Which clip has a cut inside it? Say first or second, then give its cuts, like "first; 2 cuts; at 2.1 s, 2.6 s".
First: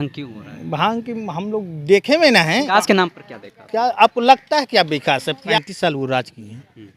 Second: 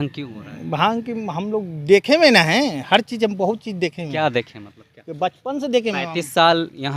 first; 2 cuts; at 2.7 s, 5.4 s